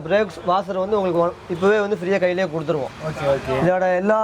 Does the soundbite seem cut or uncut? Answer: uncut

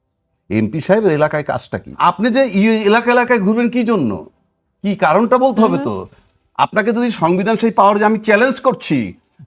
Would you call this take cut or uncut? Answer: cut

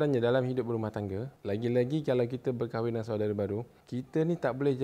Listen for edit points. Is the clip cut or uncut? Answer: cut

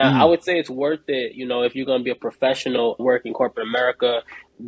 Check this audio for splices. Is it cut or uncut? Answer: uncut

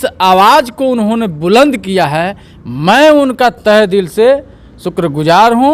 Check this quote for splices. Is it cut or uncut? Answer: uncut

